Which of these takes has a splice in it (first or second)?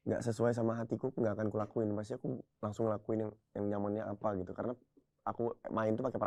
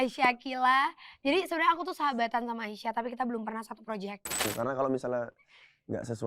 second